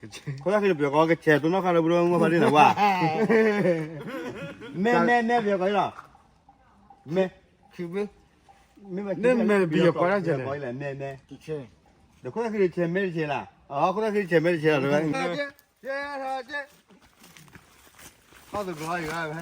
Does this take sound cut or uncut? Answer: cut